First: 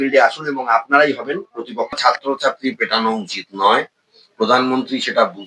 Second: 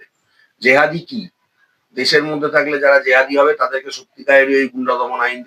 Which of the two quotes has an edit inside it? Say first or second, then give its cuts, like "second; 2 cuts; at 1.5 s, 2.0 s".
first; 1 cut; at 1.9 s